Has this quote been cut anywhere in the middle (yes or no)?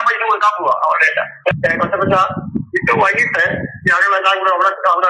yes